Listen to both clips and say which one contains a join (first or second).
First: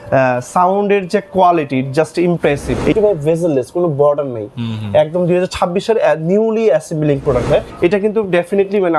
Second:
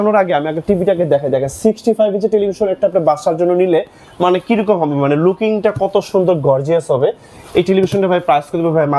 first